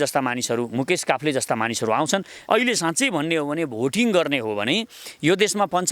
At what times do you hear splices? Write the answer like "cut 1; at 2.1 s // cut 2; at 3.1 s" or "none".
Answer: cut 1; at 2.4 s